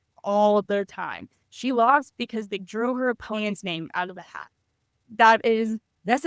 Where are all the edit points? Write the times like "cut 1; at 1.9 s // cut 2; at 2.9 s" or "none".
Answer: cut 1; at 5.0 s

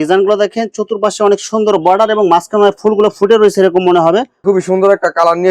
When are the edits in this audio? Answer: cut 1; at 4.4 s

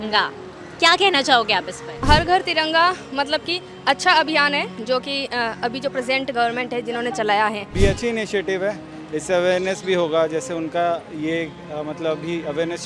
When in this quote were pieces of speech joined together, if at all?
cut 1; at 2.0 s // cut 2; at 7.6 s

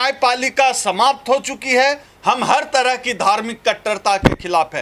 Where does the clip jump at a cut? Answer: cut 1; at 2.1 s

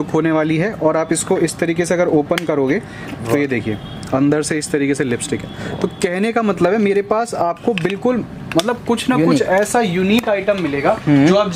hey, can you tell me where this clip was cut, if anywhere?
none

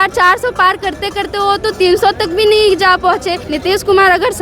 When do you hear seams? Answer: cut 1; at 3.4 s

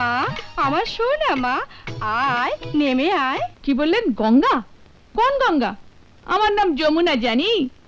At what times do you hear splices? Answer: cut 1; at 3.5 s

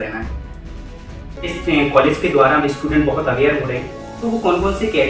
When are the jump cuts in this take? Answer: cut 1; at 1.3 s

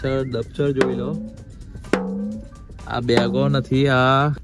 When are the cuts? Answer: none

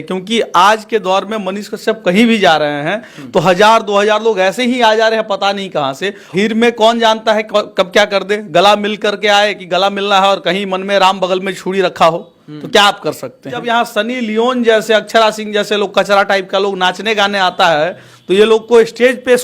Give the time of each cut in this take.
cut 1; at 6.3 s // cut 2; at 13.6 s

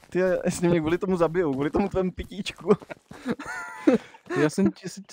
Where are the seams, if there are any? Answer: none

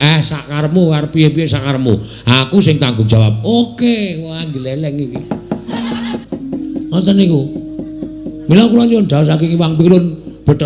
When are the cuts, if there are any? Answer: cut 1; at 5.8 s

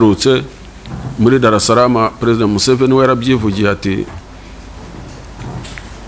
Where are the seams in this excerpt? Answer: none

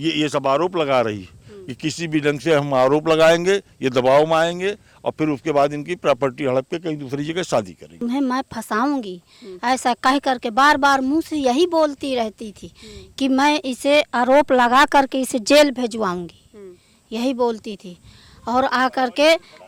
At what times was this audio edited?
cut 1; at 7.9 s

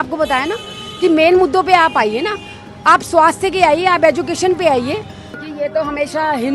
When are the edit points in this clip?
cut 1; at 5.4 s

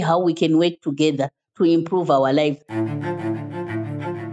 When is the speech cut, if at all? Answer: cut 1; at 2.6 s

